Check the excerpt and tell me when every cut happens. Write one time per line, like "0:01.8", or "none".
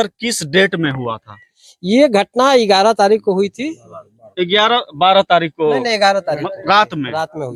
none